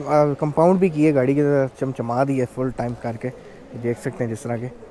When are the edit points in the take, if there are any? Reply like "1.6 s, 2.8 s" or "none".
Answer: none